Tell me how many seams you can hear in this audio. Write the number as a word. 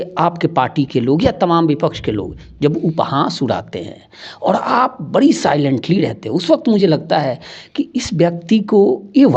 zero